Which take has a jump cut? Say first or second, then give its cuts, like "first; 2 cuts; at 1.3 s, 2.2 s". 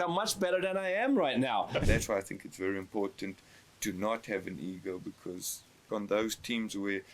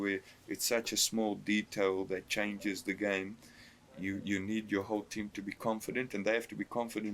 first; 2 cuts; at 1.8 s, 5.7 s